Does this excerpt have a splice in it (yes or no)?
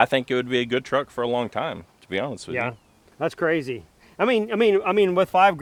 no